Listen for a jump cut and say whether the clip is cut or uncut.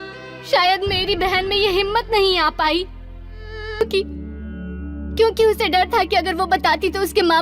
cut